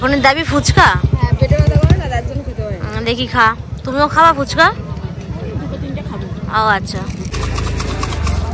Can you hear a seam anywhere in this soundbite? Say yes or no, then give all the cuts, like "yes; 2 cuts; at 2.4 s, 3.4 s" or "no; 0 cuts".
yes; 1 cut; at 7.3 s